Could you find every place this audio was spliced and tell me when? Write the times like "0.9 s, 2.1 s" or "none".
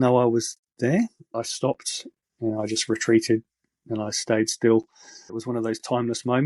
1.3 s, 5.2 s